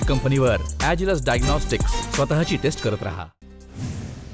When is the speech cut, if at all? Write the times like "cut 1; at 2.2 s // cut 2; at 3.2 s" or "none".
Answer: cut 1; at 3.4 s